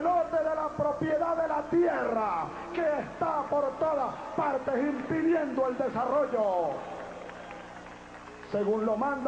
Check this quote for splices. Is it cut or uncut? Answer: uncut